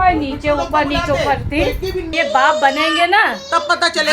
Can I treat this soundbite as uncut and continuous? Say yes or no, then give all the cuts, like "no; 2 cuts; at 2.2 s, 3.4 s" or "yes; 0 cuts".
no; 1 cut; at 2.1 s